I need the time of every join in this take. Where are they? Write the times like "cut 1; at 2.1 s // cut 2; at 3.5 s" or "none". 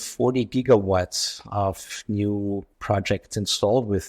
cut 1; at 2.7 s

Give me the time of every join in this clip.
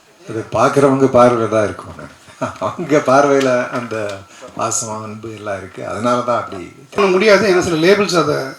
cut 1; at 7.0 s

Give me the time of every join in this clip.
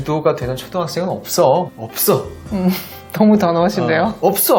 cut 1; at 1.7 s

